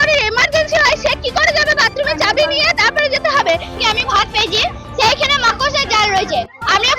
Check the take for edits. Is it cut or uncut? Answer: cut